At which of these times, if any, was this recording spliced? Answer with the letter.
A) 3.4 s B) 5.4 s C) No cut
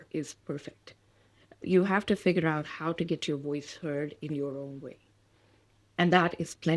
C